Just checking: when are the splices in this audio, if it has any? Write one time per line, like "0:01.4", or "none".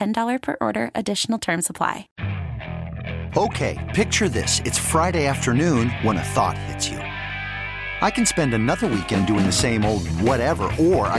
0:02.1